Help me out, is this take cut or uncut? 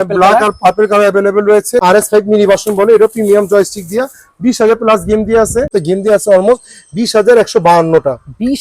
cut